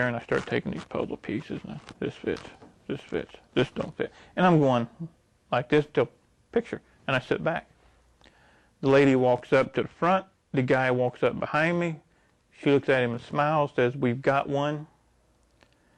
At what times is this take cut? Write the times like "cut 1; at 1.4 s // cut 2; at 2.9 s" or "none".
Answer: none